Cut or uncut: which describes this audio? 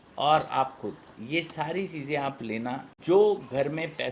cut